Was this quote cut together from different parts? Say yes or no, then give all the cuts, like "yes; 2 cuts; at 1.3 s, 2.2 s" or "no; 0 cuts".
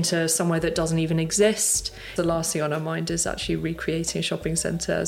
yes; 1 cut; at 2.0 s